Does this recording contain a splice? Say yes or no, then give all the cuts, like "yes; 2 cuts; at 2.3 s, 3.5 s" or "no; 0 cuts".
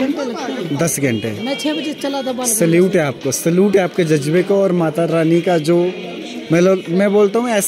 no; 0 cuts